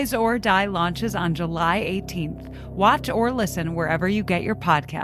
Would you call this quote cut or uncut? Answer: uncut